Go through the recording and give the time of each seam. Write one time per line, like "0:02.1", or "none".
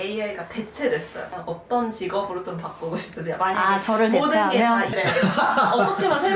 0:01.3
0:04.9